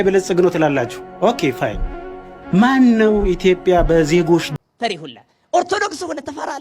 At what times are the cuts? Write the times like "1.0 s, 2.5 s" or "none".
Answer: 4.5 s